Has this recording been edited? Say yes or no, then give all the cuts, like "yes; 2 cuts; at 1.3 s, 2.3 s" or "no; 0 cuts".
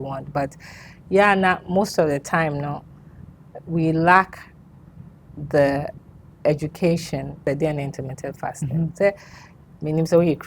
yes; 1 cut; at 7.4 s